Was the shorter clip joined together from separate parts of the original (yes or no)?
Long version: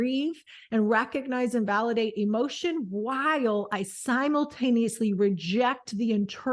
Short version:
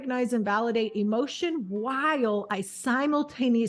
no